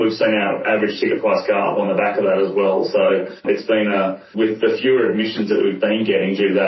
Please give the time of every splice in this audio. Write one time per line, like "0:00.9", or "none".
0:03.3
0:04.2